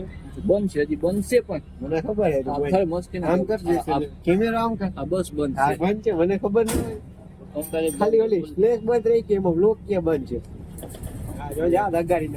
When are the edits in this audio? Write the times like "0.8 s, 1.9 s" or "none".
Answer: none